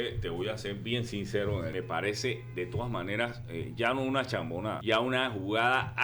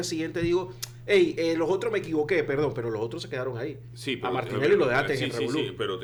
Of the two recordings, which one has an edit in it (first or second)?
first